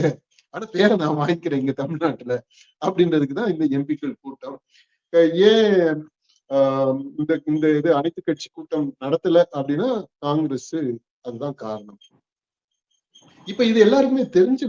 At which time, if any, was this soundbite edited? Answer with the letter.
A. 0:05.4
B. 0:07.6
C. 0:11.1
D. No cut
D